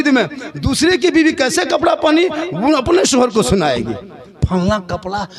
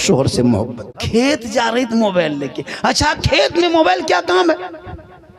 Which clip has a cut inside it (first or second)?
second